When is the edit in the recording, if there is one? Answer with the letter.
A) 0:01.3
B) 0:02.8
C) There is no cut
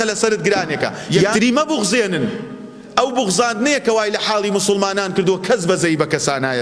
A